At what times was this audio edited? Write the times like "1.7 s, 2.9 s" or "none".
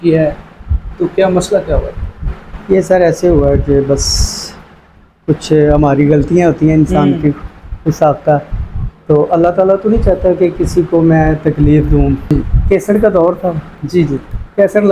12.3 s